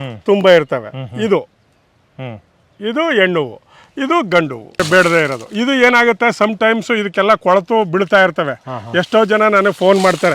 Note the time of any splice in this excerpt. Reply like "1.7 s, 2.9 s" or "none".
4.8 s